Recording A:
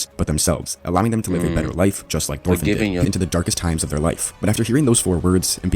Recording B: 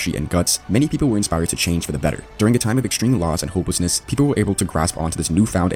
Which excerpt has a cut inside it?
A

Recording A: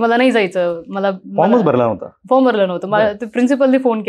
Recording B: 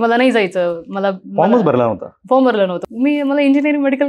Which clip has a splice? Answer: B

